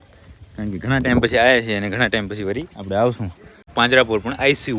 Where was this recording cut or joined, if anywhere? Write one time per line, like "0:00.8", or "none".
0:03.7